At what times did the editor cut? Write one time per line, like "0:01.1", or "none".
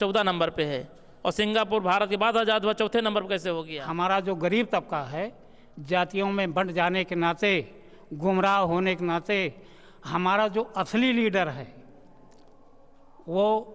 0:03.8